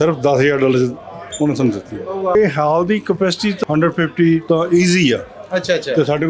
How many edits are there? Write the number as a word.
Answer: three